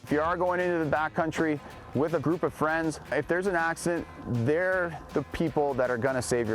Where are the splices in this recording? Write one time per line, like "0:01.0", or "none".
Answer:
0:02.2
0:03.1